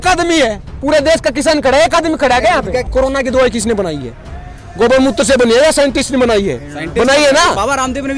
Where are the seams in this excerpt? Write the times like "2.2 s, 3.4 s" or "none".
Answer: 2.9 s